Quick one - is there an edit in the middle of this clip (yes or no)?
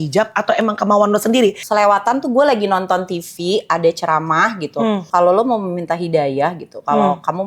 yes